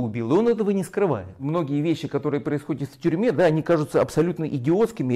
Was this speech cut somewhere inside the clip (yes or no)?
yes